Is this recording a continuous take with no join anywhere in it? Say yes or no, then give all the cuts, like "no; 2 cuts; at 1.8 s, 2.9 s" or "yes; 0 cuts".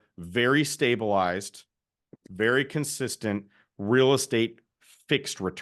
yes; 0 cuts